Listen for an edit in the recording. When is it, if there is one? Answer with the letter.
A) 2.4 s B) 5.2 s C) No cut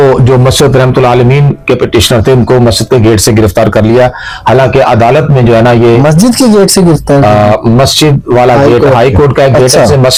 C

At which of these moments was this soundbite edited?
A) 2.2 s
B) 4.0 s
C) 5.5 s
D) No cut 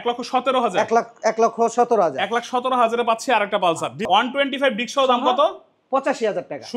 B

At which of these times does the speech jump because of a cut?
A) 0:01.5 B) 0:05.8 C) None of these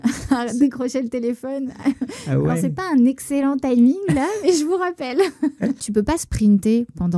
B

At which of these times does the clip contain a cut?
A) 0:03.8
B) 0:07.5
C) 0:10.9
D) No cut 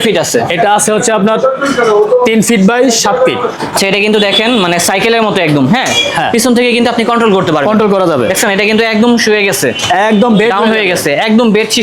A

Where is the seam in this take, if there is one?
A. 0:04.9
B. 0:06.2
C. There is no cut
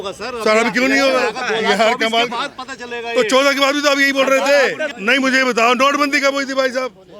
A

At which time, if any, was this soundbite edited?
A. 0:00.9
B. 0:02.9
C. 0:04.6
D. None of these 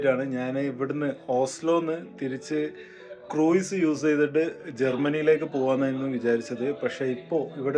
D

